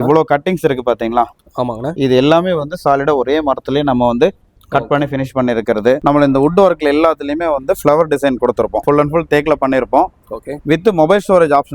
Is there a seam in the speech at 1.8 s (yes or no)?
no